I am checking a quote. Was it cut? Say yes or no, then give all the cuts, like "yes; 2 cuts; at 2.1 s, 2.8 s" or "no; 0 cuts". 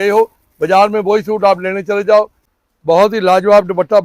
yes; 1 cut; at 2.5 s